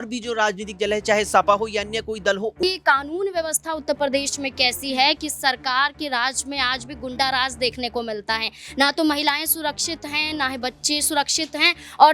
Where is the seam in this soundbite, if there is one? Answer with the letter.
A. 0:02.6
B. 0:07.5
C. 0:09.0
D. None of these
A